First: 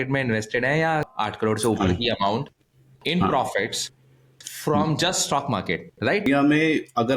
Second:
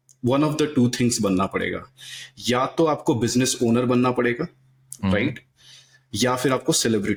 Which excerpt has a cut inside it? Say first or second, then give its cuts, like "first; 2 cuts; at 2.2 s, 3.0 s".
first; 2 cuts; at 1.1 s, 6.3 s